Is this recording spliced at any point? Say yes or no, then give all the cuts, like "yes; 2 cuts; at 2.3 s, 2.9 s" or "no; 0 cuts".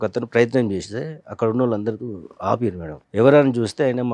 yes; 1 cut; at 2.9 s